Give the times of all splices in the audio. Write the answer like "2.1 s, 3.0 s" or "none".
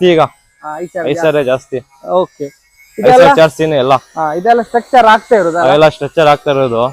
none